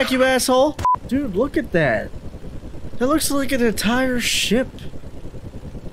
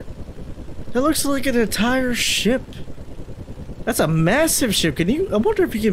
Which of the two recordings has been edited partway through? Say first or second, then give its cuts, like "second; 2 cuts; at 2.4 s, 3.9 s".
first; 1 cut; at 0.9 s